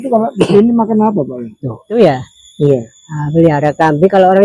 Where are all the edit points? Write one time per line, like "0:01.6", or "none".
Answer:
0:02.0